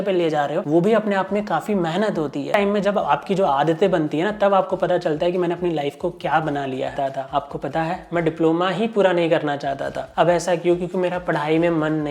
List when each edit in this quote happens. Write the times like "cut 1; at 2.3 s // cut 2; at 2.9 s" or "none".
cut 1; at 2.5 s // cut 2; at 6.9 s